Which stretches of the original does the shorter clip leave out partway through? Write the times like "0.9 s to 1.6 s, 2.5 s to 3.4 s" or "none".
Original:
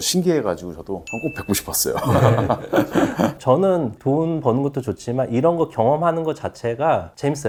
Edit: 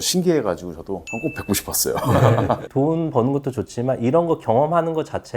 2.6 s to 3.9 s

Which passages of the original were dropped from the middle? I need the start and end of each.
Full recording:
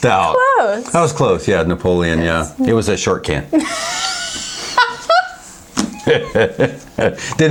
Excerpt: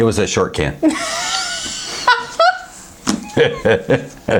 none

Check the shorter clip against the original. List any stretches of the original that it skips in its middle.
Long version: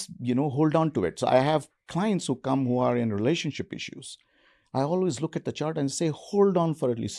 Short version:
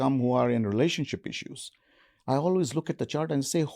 none

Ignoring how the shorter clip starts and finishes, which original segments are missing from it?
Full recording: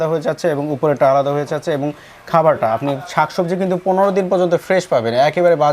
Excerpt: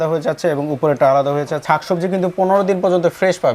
1.6 s to 3.0 s

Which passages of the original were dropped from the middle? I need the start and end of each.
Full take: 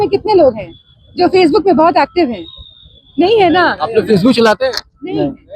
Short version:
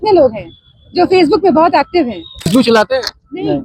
2.7 s to 4.2 s

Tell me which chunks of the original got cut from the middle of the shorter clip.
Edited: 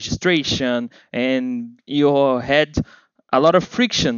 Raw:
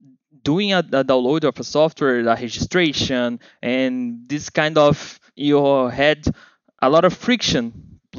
4.2 s to 5.2 s

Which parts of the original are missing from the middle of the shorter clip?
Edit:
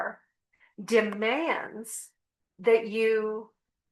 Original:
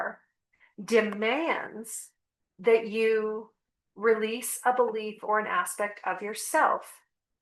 none

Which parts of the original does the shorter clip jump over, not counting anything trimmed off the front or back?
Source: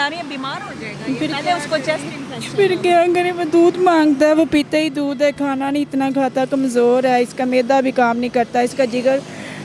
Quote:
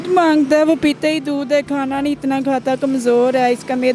none

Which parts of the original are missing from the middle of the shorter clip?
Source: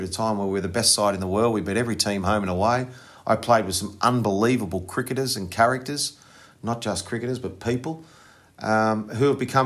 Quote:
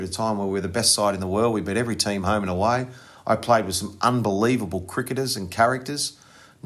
none

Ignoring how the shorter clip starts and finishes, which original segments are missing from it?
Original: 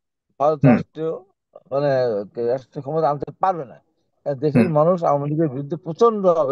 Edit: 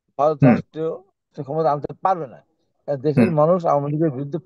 1.6 s to 2.7 s

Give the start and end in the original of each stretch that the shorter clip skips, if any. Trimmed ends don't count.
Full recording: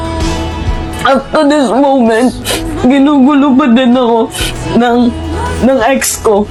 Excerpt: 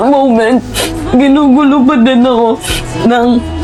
none

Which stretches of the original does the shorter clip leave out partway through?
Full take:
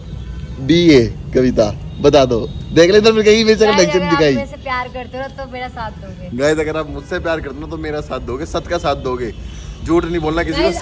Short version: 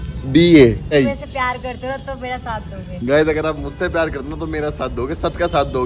1.3 s to 4.2 s

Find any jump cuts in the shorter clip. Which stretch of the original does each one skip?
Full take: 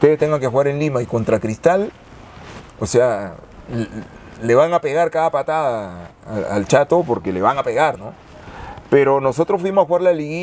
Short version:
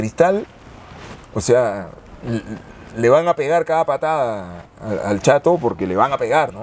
none

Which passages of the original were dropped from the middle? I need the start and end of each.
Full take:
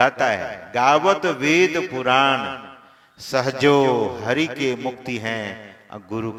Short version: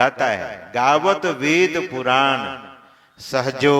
none

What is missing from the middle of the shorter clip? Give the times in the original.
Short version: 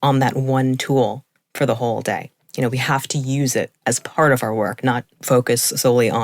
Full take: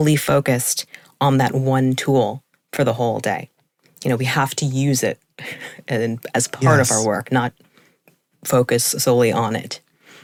3.6 s to 3.8 s, 5.2 s to 6.2 s, 7.6 s to 8.3 s

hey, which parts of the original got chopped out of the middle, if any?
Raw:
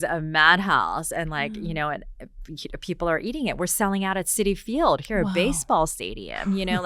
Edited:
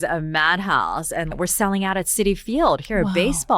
1.3 s to 3.5 s

